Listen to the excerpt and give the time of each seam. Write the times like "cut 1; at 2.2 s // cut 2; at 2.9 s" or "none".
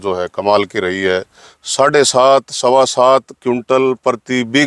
cut 1; at 1.4 s